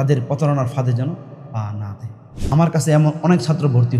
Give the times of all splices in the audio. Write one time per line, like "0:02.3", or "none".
0:02.3